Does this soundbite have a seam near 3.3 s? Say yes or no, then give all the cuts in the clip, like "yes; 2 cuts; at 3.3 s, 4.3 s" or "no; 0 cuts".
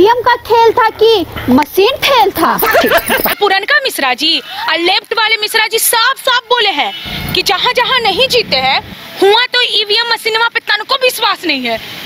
yes; 1 cut; at 3.3 s